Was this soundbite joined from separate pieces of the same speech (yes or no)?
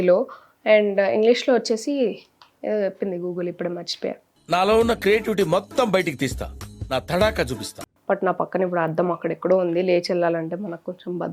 yes